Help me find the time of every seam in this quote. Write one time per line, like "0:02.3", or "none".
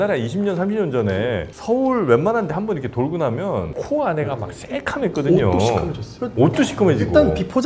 none